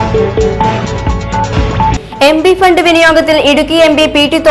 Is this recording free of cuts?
no; 1 cut; at 1.2 s

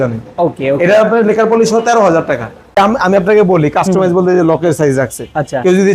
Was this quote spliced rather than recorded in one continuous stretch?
yes; 1 cut; at 2.8 s

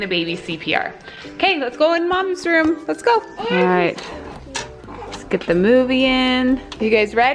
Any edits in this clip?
no; 0 cuts

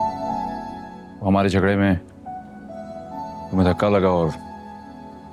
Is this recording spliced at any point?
no; 0 cuts

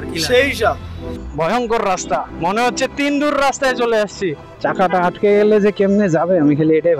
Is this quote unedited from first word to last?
no; 2 cuts; at 1.2 s, 4.4 s

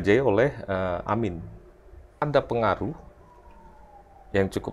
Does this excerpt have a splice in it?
yes; 1 cut; at 2.2 s

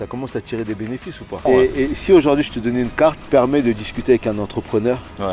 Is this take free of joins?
no; 2 cuts; at 1.5 s, 3.2 s

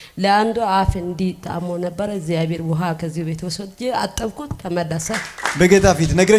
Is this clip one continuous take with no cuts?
no; 1 cut; at 5.3 s

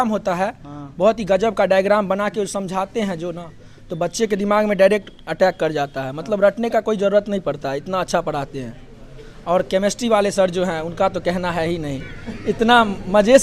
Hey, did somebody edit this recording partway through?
no; 0 cuts

